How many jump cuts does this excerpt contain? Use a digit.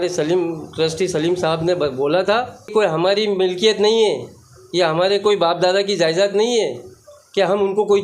1